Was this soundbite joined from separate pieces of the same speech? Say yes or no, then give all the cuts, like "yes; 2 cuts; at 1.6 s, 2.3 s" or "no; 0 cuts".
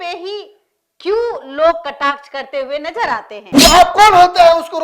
yes; 1 cut; at 3.5 s